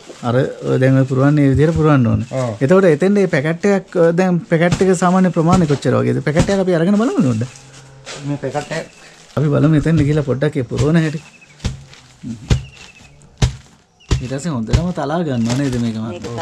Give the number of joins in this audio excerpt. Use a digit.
1